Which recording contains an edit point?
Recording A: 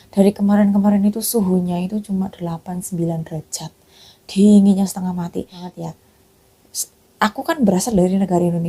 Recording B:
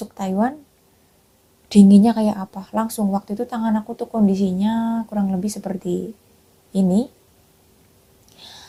A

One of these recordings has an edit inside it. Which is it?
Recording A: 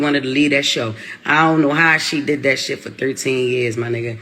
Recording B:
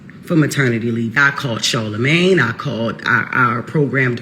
B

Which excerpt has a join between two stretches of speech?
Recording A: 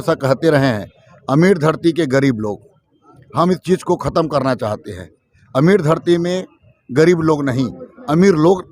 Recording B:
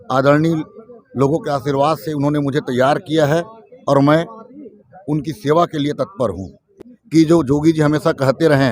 B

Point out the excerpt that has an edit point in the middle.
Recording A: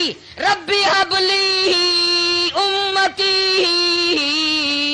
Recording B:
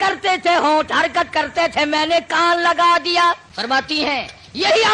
B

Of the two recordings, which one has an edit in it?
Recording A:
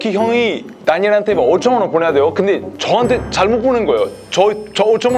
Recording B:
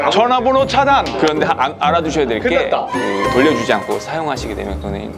B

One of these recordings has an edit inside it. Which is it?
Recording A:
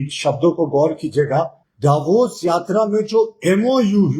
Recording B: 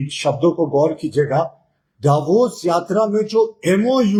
A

